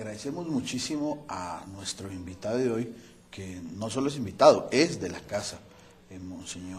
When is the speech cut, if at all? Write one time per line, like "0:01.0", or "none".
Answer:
none